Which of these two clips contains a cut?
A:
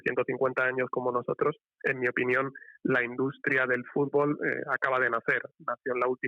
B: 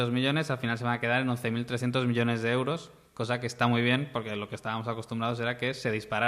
A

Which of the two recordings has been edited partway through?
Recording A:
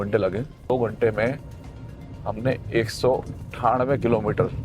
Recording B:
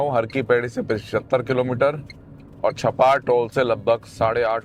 A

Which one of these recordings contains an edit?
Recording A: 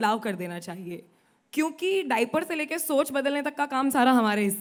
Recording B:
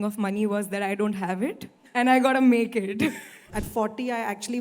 B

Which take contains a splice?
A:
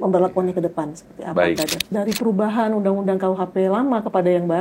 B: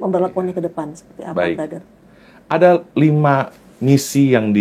A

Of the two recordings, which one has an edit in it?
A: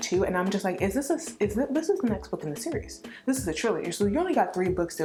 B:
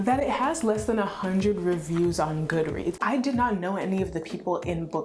B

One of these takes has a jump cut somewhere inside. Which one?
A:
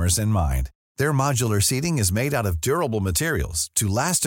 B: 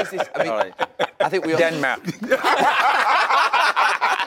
B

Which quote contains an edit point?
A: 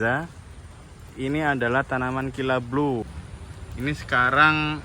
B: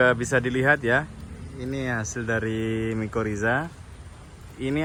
A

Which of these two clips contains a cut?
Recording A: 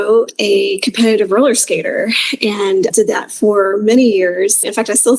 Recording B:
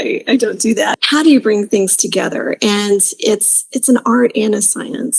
B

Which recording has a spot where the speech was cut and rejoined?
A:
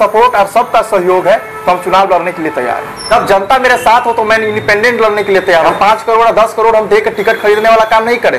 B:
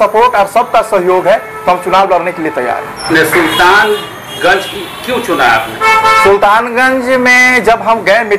A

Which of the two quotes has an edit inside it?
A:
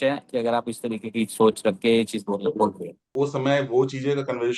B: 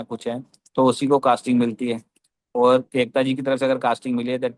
A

